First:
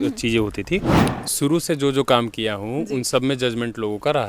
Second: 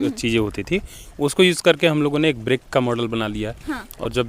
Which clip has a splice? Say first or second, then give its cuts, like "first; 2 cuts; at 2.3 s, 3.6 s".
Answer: first; 1 cut; at 1.0 s